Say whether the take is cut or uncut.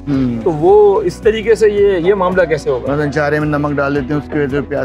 uncut